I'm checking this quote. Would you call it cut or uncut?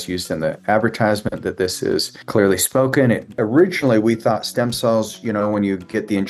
cut